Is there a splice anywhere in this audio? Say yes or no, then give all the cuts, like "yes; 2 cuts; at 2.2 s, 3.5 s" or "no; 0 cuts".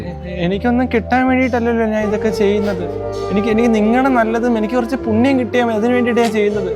no; 0 cuts